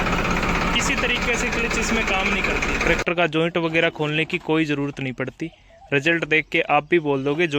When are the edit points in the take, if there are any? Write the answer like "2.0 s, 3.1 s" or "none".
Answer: 2.8 s